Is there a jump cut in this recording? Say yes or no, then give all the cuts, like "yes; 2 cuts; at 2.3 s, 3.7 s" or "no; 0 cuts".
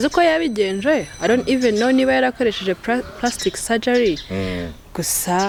no; 0 cuts